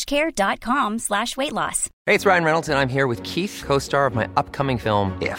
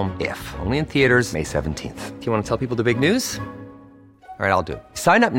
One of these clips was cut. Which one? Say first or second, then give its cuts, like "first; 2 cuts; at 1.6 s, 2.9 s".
first; 1 cut; at 1.9 s